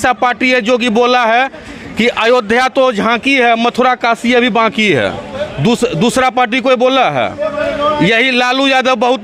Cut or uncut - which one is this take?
uncut